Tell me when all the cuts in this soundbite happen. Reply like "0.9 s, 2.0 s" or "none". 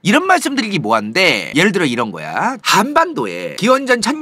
none